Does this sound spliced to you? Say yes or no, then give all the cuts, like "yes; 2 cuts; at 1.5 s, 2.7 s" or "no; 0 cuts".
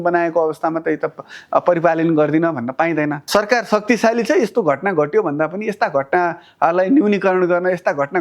yes; 1 cut; at 3.2 s